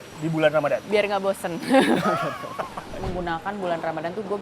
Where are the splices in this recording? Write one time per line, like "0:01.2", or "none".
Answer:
0:02.9